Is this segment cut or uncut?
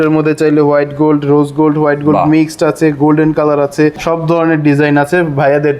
cut